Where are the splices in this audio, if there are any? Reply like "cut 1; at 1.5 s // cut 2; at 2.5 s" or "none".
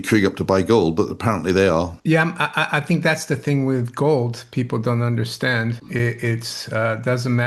cut 1; at 1.9 s // cut 2; at 5.8 s